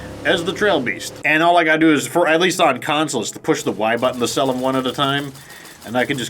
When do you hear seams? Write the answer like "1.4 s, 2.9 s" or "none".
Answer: 1.1 s